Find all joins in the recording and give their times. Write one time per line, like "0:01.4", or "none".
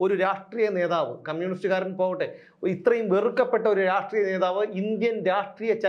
none